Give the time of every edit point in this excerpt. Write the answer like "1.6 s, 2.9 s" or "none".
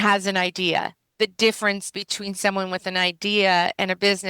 1.0 s

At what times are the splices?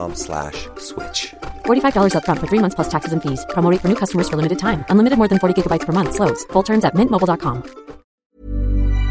8.2 s

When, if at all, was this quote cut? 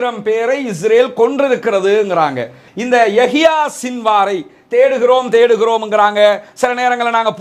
2.6 s

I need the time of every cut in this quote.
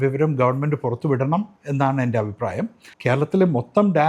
2.8 s

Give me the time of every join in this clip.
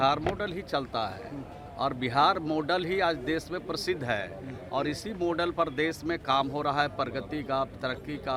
none

